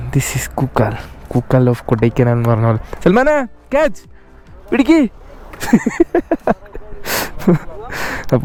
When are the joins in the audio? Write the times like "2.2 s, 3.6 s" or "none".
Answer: none